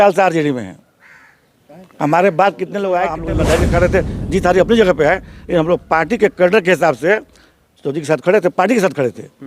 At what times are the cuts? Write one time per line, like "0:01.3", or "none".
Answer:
0:03.2